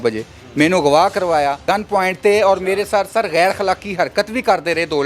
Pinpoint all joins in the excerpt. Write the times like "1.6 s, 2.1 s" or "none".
1.6 s